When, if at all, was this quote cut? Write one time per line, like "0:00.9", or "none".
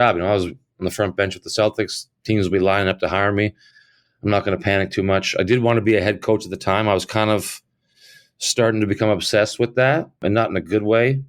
0:10.2